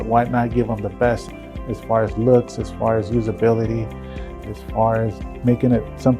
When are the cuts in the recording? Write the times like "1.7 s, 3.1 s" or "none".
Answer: 1.3 s, 4.4 s, 5.4 s